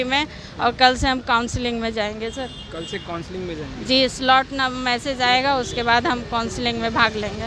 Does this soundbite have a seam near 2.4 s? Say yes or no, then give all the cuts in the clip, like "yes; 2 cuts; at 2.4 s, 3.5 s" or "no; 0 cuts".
no; 0 cuts